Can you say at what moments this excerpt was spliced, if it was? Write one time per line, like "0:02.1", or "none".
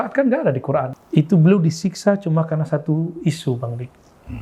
0:01.0